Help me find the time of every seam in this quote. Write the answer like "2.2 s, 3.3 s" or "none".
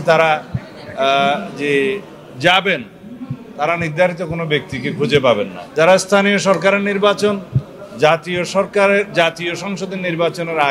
5.6 s